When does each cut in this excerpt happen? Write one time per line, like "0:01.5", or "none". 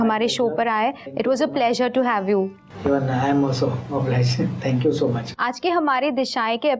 0:01.0
0:05.3